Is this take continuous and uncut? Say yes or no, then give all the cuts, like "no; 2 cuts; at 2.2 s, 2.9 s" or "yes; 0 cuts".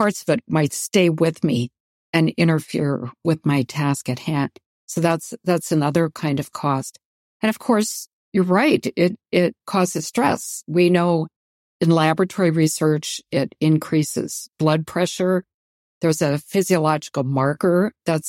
yes; 0 cuts